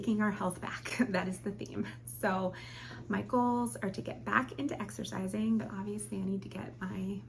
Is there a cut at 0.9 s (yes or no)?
no